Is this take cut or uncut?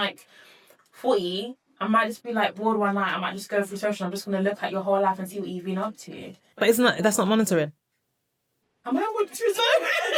uncut